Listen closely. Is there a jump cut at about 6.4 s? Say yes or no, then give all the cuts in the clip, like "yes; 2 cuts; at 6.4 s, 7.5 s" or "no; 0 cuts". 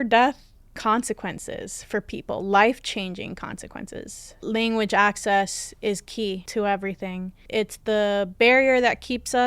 yes; 3 cuts; at 4.3 s, 6.4 s, 7.4 s